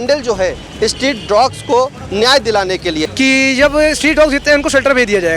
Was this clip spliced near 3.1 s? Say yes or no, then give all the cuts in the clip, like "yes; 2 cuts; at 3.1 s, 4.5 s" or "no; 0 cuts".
yes; 1 cut; at 3.1 s